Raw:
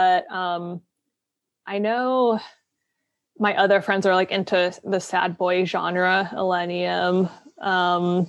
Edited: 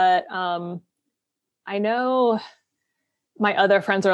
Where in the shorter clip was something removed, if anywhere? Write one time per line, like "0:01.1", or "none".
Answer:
none